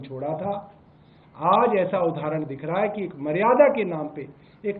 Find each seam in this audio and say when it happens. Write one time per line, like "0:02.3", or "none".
none